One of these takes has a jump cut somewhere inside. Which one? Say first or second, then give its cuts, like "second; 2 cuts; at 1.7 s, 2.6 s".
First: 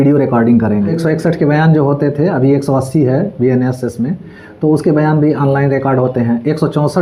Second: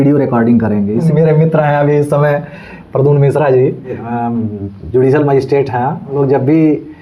second; 3 cuts; at 1.0 s, 4.1 s, 6.1 s